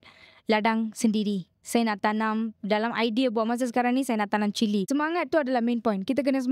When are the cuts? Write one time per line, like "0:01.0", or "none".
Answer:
0:04.9